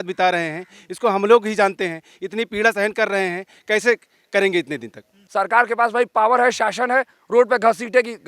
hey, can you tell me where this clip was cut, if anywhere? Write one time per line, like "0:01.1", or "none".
0:05.1